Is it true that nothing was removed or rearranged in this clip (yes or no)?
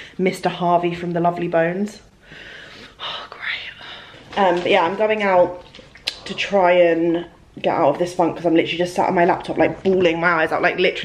yes